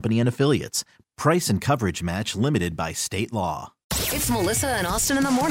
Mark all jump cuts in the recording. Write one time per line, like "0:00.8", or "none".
0:03.9